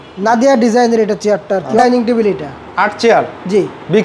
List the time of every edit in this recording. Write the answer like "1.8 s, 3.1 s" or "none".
1.7 s